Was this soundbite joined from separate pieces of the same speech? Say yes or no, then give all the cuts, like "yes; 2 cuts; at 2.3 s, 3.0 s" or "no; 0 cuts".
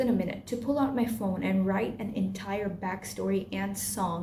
no; 0 cuts